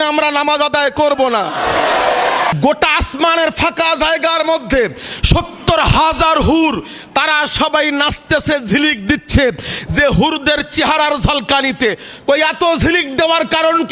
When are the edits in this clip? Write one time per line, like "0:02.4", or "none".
0:02.5